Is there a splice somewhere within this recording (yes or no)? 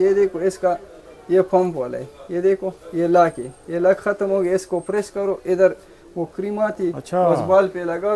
no